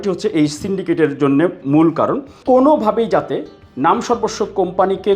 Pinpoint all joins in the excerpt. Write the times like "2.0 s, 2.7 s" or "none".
2.3 s